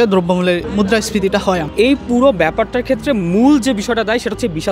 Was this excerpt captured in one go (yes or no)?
no